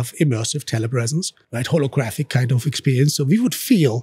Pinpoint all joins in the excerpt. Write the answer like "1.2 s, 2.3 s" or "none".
1.4 s